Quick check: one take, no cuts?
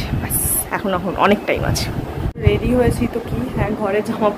no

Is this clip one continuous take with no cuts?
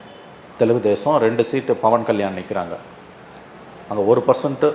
yes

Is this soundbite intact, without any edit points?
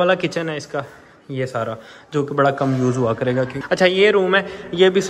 no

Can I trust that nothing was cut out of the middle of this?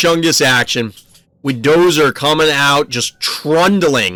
yes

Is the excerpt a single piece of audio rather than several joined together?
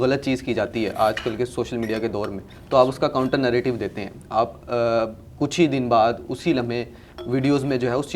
yes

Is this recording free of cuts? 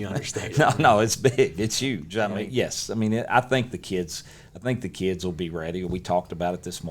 no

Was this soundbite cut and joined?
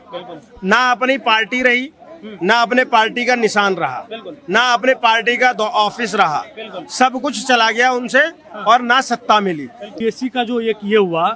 yes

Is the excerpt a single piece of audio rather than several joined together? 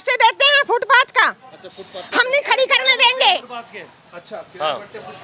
yes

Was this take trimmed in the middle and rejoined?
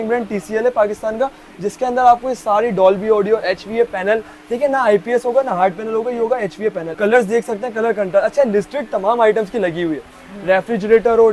no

